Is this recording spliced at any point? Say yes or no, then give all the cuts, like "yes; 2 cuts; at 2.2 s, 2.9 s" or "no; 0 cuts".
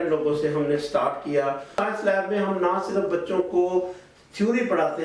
yes; 1 cut; at 1.8 s